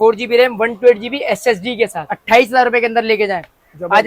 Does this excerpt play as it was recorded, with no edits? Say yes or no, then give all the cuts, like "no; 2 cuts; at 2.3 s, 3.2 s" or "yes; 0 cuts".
yes; 0 cuts